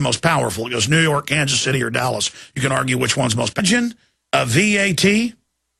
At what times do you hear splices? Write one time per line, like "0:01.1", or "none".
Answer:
none